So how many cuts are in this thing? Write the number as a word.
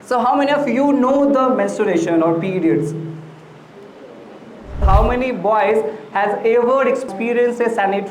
two